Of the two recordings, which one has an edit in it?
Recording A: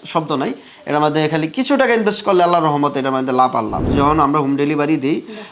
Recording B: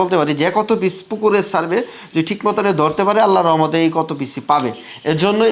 A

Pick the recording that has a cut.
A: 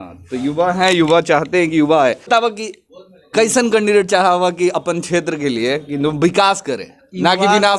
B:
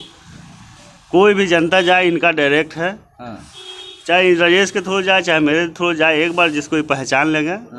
A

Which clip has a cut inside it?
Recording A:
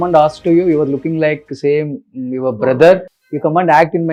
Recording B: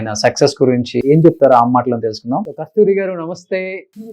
B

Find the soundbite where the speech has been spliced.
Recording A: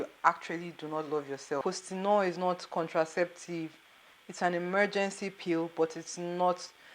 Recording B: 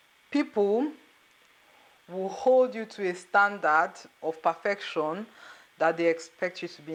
A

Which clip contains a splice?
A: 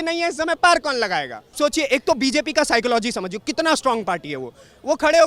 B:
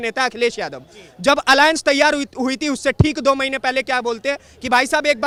A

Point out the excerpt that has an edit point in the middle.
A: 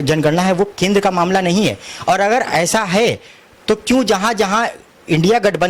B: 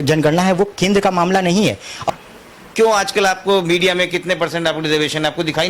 B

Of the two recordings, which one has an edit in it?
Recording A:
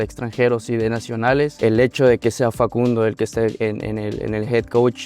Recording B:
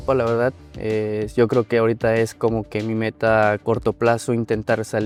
A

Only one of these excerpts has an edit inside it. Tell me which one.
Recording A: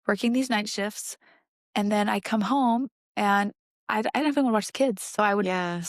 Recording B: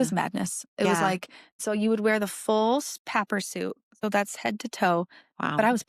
B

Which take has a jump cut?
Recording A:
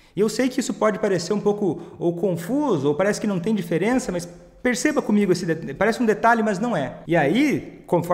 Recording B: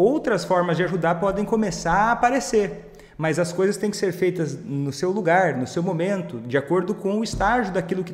A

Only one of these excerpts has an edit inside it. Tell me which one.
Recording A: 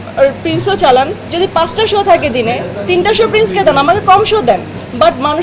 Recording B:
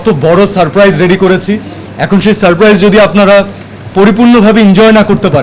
A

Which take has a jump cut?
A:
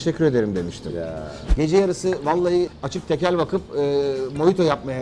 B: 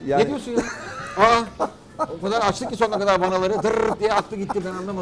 A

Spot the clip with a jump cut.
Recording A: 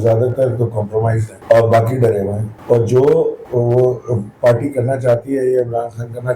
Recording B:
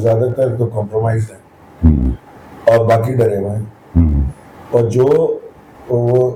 A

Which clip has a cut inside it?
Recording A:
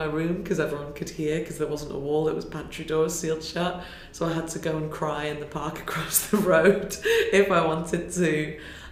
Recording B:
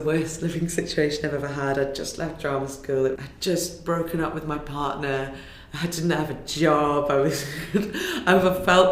B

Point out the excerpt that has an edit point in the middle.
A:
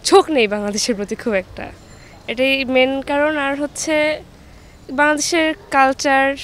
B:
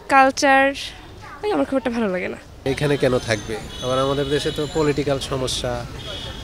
B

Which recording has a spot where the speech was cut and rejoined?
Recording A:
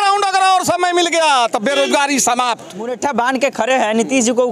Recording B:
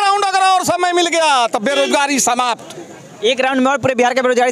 A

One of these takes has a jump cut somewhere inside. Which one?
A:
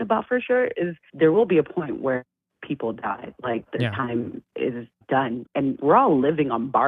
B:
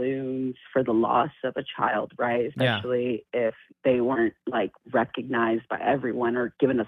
A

